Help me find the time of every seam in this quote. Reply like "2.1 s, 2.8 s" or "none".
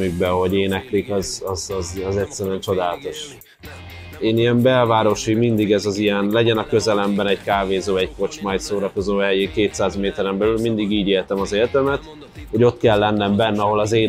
3.7 s